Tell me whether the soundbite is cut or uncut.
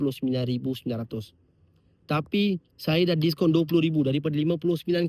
uncut